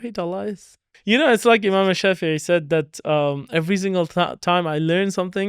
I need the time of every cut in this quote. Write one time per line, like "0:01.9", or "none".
0:01.0